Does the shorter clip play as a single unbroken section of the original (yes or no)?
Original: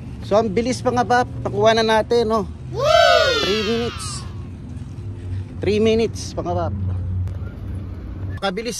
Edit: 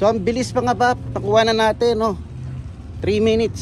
no